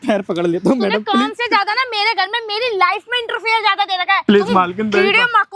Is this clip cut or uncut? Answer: cut